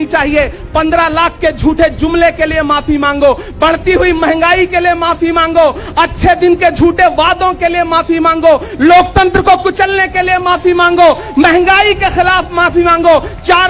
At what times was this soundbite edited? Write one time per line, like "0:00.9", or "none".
none